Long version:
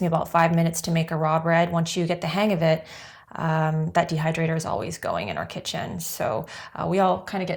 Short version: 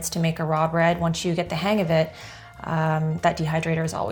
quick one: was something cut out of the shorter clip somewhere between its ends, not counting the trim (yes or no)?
no